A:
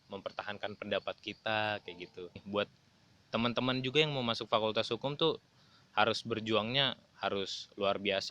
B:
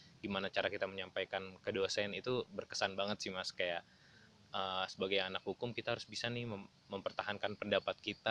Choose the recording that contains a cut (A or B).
A